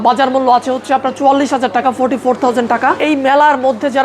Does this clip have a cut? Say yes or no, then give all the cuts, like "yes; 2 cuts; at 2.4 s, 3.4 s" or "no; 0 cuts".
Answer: yes; 1 cut; at 3.0 s